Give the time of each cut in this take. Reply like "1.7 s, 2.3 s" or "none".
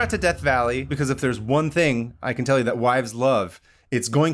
0.9 s

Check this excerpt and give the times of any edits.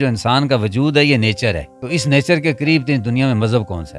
1.7 s

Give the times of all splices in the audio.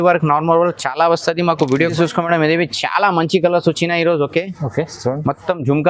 1.9 s

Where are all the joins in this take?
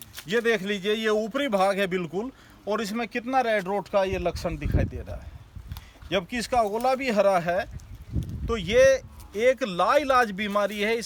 none

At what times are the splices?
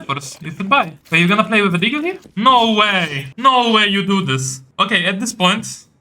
1.0 s, 2.2 s, 3.2 s, 4.6 s

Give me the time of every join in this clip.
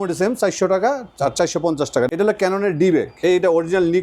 2.1 s, 3.1 s

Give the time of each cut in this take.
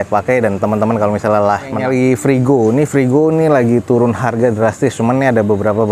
1.8 s

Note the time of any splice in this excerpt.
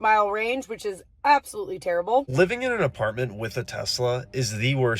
2.3 s

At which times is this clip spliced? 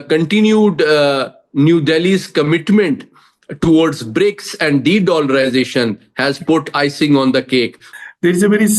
7.8 s

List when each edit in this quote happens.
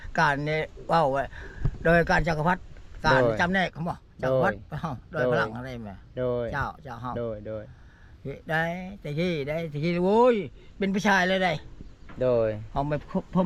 none

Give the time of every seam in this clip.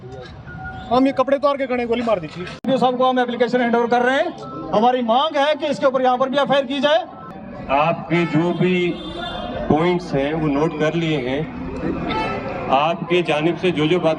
2.6 s, 7.3 s

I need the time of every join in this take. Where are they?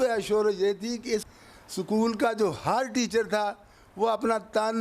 1.3 s

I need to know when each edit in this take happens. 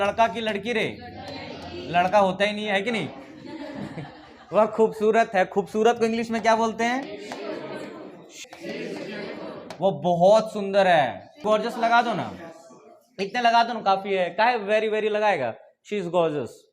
8.4 s, 11.4 s

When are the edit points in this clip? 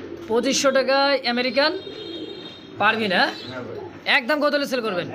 none

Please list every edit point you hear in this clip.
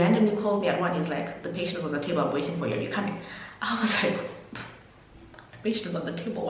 none

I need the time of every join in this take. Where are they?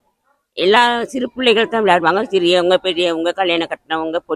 none

